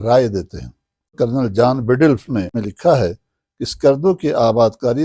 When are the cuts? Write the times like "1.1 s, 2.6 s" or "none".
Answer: 1.1 s, 2.7 s